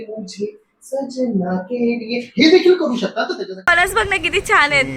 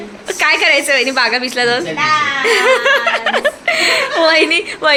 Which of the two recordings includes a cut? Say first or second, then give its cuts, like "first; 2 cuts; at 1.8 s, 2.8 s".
first; 1 cut; at 3.7 s